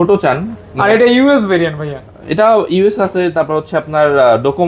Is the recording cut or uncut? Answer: uncut